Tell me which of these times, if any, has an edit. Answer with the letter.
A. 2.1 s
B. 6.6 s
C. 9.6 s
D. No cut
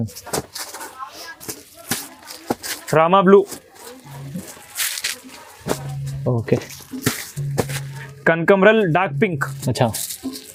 D